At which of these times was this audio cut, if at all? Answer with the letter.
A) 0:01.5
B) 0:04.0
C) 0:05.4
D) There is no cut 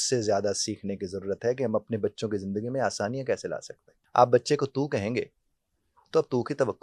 B